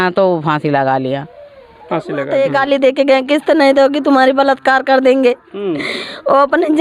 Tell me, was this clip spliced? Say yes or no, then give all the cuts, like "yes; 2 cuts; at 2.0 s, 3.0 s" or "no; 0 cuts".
yes; 1 cut; at 2.2 s